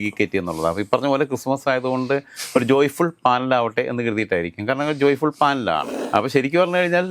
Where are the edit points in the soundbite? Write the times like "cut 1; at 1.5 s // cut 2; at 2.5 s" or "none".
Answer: cut 1; at 5.9 s